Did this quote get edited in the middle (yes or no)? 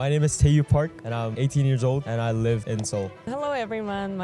yes